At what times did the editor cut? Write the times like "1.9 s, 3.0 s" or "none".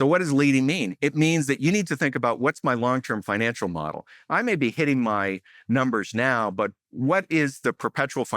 none